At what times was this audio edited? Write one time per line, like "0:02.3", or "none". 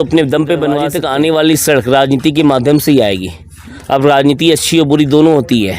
0:00.9